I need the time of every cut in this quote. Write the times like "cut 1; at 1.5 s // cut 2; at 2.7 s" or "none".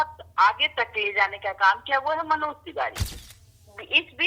cut 1; at 3.0 s